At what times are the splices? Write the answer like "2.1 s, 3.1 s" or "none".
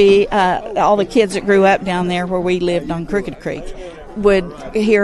4.0 s